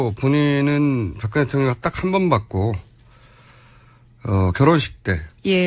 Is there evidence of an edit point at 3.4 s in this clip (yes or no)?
yes